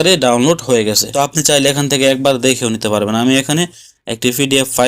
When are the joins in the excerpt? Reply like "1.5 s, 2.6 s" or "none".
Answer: 1.1 s